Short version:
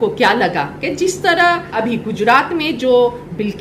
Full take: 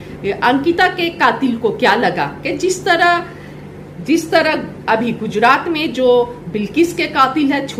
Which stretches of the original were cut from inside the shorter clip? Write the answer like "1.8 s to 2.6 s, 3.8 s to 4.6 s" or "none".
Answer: 3.3 s to 4.8 s